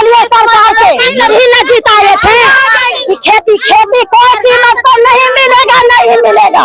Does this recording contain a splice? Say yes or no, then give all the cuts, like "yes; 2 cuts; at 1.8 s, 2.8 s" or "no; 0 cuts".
yes; 1 cut; at 1.3 s